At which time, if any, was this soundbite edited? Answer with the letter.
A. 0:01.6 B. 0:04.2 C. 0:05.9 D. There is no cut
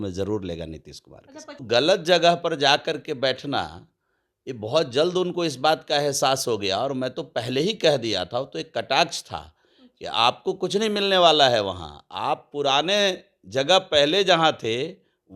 A